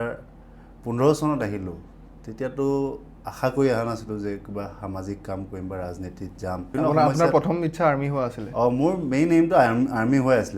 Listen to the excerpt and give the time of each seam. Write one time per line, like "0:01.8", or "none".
0:06.7